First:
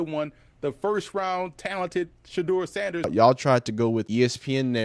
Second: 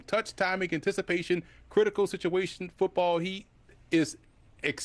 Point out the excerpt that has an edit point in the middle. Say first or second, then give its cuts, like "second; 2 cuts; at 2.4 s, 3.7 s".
first; 2 cuts; at 3.1 s, 4.1 s